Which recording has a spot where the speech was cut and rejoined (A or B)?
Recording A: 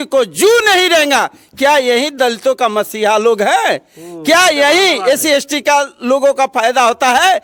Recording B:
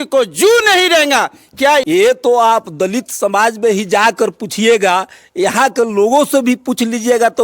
B